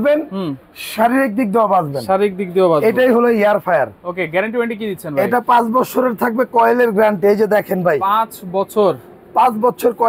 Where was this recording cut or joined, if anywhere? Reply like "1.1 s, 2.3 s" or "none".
none